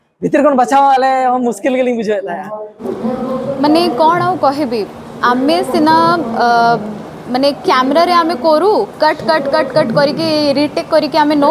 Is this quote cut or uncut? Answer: cut